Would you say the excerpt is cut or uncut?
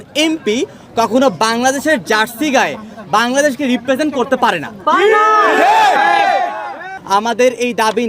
cut